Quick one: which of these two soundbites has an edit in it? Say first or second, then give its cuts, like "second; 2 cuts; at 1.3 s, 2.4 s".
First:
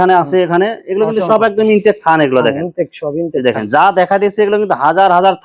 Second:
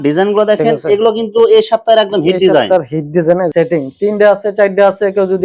second; 1 cut; at 3.5 s